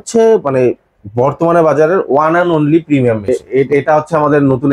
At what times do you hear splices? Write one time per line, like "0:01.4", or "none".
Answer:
0:03.5